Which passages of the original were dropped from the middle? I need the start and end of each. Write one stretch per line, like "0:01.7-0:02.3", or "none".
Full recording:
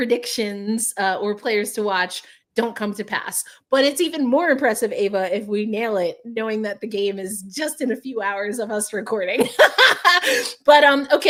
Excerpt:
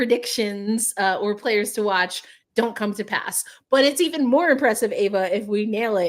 none